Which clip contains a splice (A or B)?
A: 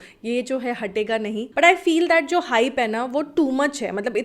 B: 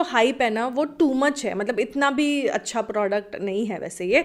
A